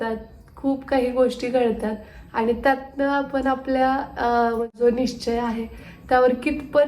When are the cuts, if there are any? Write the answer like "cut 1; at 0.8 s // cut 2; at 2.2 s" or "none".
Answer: cut 1; at 4.7 s